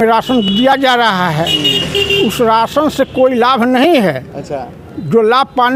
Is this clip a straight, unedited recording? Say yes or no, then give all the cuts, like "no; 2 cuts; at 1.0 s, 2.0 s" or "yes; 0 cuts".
yes; 0 cuts